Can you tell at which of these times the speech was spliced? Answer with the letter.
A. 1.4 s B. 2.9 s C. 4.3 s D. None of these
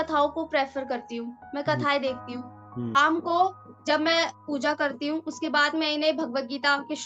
B